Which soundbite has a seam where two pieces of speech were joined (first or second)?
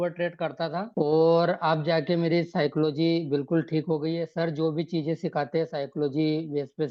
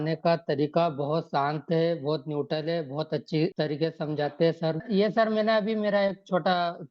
second